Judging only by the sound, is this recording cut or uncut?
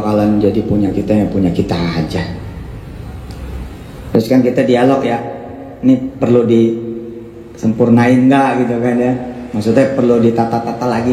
uncut